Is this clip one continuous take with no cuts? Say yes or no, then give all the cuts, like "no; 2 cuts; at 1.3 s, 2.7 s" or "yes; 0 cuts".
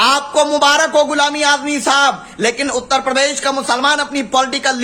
yes; 0 cuts